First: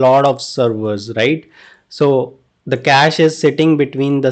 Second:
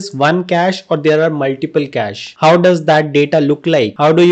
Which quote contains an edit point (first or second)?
second